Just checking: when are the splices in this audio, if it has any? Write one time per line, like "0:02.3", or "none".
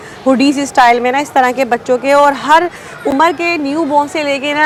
none